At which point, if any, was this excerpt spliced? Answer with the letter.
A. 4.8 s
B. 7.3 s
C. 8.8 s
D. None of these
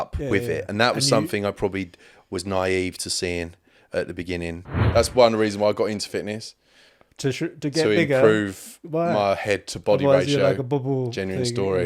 A